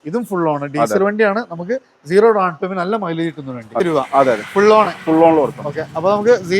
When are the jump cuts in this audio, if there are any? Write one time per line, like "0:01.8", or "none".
0:03.8